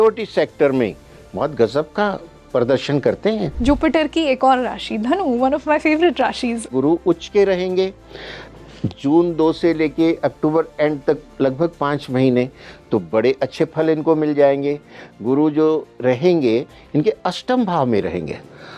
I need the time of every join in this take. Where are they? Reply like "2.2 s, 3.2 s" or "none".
3.5 s, 6.7 s